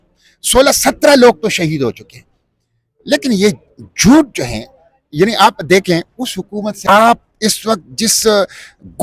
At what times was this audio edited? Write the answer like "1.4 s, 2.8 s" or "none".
6.8 s